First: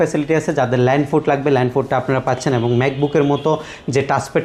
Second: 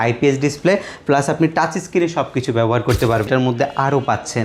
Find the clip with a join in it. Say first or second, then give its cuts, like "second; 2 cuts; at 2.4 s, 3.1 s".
second; 1 cut; at 3.3 s